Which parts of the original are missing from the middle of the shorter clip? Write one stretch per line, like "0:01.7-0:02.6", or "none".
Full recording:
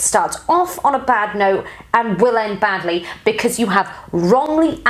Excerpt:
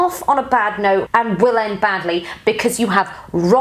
0:01.6-0:01.9

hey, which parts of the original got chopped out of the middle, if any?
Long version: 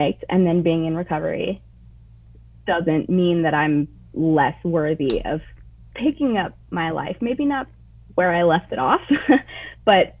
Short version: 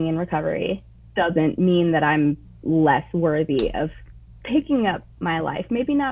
0:01.7-0:02.5

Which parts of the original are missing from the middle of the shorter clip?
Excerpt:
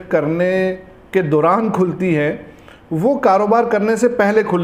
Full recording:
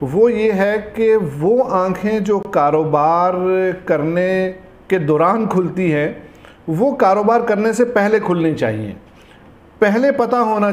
none

